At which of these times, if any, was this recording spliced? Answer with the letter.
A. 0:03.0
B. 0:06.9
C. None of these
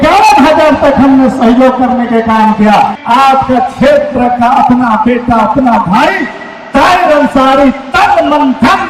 A